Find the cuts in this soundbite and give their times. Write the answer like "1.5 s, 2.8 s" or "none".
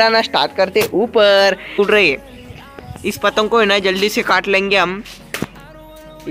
1.8 s